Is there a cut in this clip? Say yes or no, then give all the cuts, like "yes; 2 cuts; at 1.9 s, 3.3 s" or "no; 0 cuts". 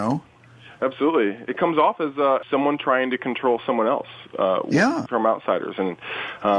yes; 2 cuts; at 2.4 s, 5.0 s